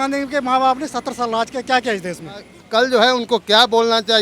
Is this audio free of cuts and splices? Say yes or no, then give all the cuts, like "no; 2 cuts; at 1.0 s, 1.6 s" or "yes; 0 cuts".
no; 1 cut; at 2.5 s